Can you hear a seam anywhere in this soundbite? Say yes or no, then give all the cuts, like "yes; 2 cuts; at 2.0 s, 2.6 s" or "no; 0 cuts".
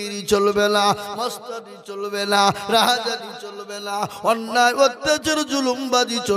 no; 0 cuts